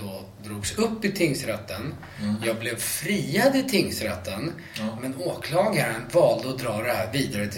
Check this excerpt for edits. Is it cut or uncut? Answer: uncut